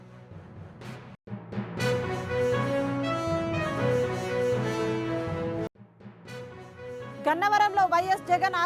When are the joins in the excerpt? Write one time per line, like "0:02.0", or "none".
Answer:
0:00.9
0:05.6